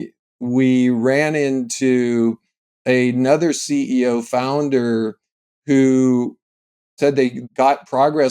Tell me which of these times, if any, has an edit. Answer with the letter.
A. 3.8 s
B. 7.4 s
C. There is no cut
B